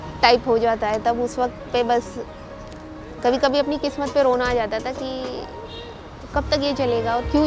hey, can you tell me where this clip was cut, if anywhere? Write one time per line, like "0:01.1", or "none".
none